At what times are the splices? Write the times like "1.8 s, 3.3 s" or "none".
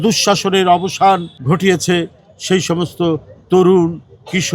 1.3 s